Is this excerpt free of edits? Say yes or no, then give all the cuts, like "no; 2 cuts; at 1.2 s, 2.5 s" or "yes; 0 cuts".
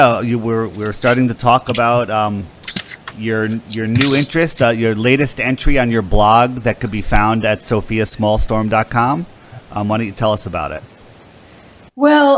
yes; 0 cuts